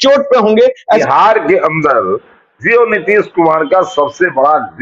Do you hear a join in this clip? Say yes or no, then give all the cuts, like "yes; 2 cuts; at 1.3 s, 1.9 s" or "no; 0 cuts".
yes; 1 cut; at 1.0 s